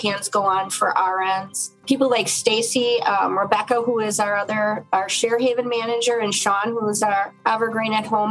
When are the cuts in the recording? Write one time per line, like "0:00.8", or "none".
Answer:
0:01.7
0:07.3